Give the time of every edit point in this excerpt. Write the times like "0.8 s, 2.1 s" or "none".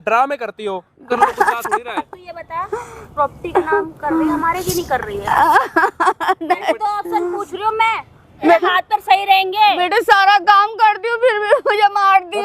1.1 s, 8.5 s